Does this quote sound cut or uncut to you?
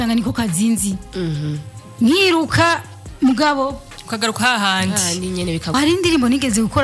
cut